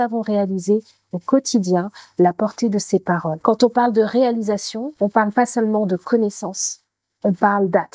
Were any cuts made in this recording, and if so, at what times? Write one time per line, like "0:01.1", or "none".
0:03.3
0:04.8